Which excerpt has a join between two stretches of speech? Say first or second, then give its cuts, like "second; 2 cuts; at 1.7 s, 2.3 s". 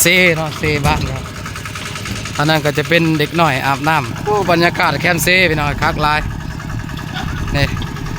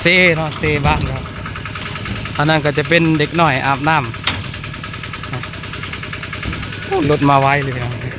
first; 1 cut; at 4.1 s